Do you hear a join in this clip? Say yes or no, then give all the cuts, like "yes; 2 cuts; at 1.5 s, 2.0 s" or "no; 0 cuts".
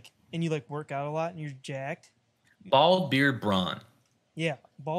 no; 0 cuts